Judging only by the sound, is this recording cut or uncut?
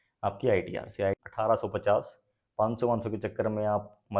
cut